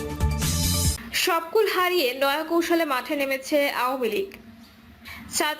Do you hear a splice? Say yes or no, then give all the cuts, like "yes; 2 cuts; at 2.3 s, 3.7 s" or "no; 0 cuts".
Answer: yes; 1 cut; at 1.0 s